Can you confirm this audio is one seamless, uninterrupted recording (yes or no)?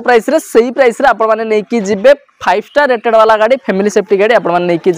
yes